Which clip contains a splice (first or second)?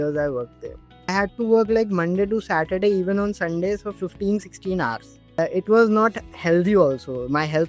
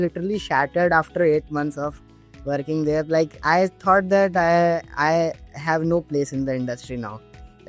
first